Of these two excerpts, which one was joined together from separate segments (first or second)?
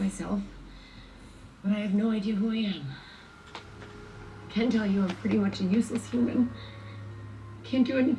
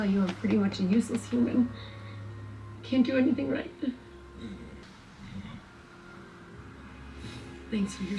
second